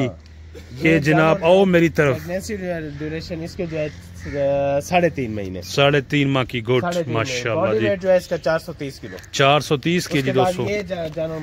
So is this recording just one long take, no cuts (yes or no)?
yes